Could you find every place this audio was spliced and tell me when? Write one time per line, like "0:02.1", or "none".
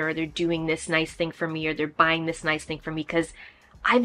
none